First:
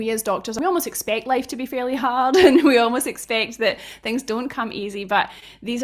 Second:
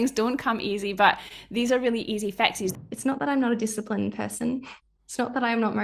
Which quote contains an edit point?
second; 1 cut; at 2.7 s

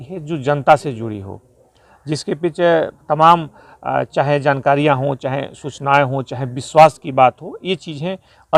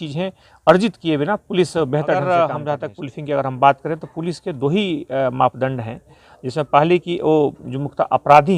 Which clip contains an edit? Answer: second; 1 cut; at 2.2 s

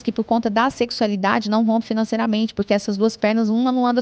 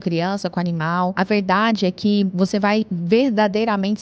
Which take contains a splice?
second; 2 cuts; at 1.1 s, 2.7 s

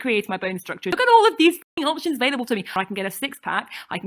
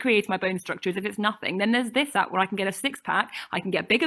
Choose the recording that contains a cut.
first; 2 cuts; at 0.9 s, 2.7 s

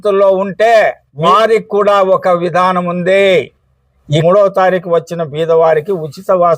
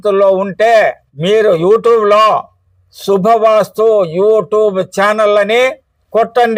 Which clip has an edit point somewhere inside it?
first; 2 cuts; at 1.1 s, 4.2 s

